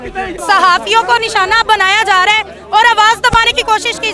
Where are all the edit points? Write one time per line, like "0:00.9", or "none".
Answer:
none